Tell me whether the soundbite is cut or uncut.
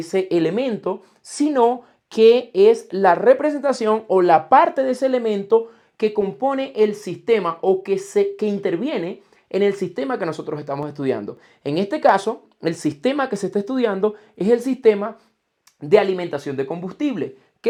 uncut